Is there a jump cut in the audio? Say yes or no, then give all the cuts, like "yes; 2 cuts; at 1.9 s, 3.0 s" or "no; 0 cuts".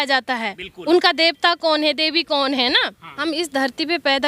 yes; 1 cut; at 3.0 s